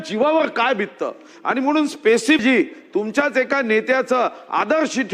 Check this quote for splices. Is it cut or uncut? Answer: cut